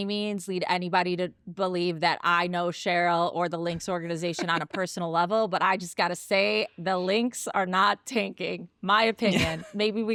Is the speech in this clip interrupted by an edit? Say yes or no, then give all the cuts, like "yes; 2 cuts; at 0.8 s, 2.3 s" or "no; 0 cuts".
no; 0 cuts